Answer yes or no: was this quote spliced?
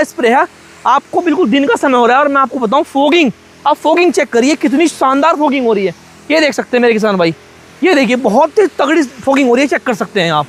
no